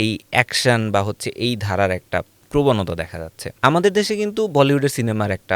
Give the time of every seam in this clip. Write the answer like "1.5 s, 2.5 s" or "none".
2.4 s, 3.5 s